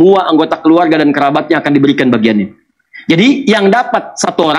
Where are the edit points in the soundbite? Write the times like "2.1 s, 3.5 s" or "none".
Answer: none